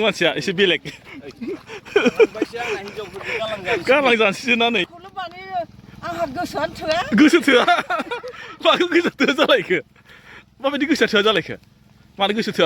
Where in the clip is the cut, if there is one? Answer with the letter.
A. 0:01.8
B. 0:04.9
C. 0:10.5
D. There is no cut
B